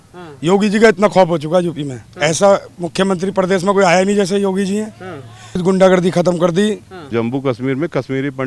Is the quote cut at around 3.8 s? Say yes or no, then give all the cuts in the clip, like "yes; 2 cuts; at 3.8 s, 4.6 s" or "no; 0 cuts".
no; 3 cuts; at 2.1 s, 5.6 s, 7.0 s